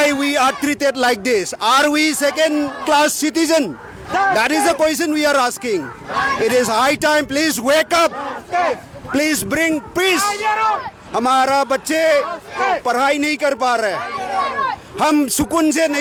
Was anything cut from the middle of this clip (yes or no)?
no